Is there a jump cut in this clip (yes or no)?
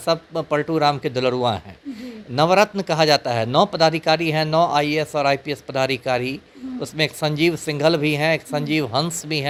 no